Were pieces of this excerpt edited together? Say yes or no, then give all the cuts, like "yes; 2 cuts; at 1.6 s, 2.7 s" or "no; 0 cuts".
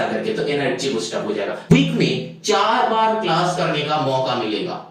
yes; 1 cut; at 1.7 s